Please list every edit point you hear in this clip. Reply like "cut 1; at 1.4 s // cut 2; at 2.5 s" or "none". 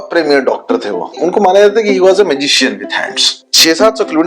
cut 1; at 1.2 s // cut 2; at 3.4 s